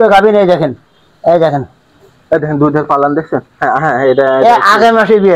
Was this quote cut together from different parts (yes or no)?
no